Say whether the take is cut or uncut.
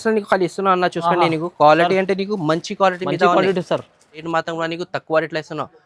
cut